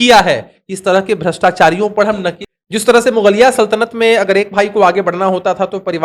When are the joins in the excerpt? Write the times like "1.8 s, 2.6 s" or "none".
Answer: 2.4 s